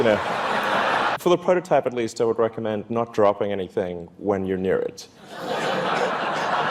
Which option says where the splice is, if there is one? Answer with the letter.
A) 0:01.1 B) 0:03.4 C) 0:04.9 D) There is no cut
A